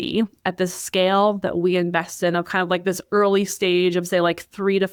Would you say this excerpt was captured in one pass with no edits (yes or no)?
yes